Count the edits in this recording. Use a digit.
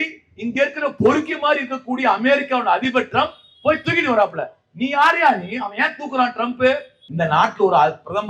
1